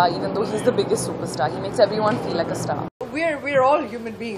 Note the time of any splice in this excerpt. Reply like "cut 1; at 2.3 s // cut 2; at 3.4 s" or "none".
cut 1; at 3.0 s